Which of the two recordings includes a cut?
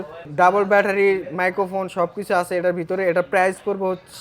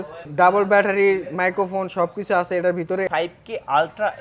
second; 1 cut; at 3.0 s

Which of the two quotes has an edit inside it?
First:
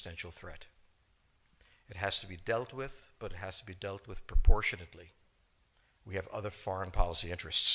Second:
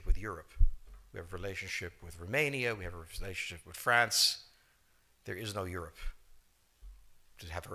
second; 1 cut; at 6.0 s

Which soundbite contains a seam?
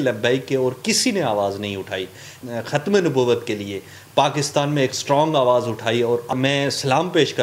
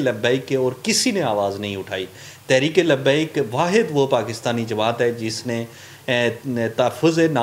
first; 2 cuts; at 2.4 s, 6.3 s

